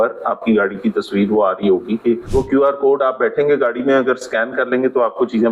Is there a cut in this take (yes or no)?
yes